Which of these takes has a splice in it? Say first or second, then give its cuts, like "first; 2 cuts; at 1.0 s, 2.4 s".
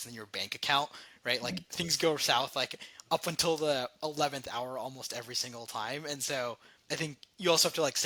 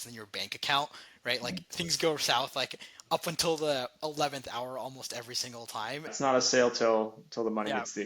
second; 1 cut; at 6.1 s